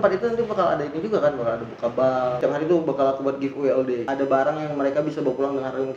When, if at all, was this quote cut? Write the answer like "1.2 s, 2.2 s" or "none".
2.4 s, 4.1 s